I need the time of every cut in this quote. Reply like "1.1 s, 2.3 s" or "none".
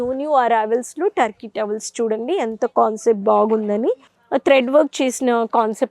4.1 s